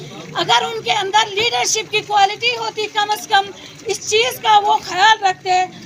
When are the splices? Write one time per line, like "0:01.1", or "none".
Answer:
none